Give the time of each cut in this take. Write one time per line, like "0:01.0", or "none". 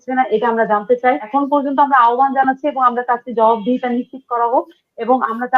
0:01.2

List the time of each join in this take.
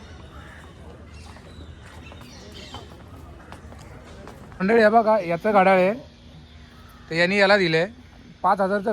0:04.6

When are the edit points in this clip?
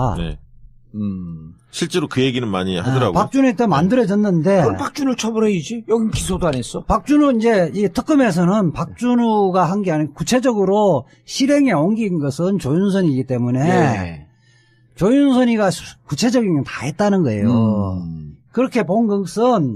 none

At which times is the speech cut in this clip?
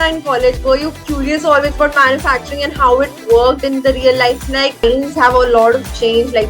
0:04.8

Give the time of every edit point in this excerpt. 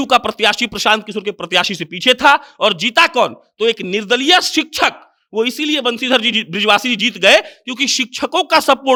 none

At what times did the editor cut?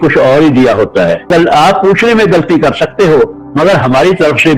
0:01.3

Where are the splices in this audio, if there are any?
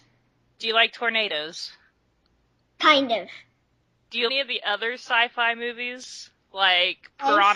none

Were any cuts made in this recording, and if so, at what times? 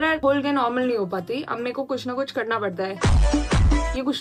none

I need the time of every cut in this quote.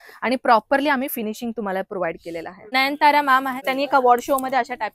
0:02.7
0:03.6

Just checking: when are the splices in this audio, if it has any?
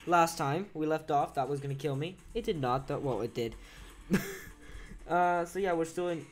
0:01.7

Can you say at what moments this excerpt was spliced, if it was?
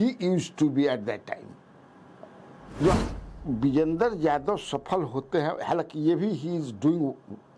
0:03.0

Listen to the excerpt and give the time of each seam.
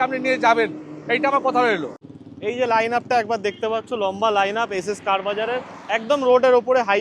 0:02.2

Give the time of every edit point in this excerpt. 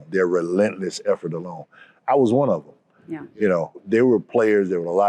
0:03.8

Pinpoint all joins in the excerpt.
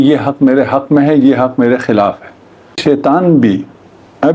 0:02.8

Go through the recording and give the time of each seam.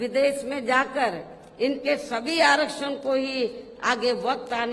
none

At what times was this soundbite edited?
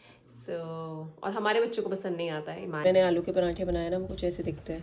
0:02.8

